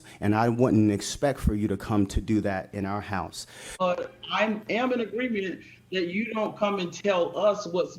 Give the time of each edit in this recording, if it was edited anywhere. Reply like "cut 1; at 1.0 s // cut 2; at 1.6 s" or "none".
cut 1; at 3.7 s